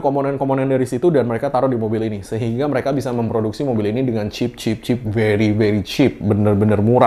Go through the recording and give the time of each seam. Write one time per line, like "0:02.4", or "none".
none